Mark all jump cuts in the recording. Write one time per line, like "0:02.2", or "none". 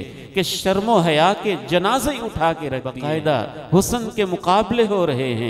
0:02.9